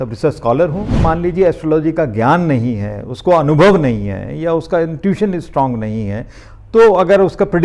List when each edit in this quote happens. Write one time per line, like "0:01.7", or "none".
0:01.0